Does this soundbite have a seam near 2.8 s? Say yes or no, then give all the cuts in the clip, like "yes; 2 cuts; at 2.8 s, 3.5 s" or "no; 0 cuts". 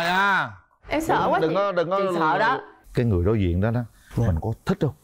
yes; 1 cut; at 2.8 s